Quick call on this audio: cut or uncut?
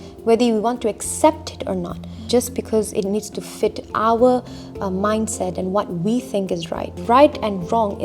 cut